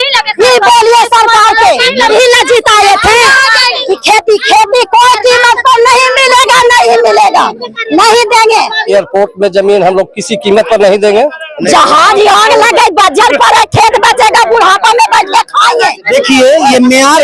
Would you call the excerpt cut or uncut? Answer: cut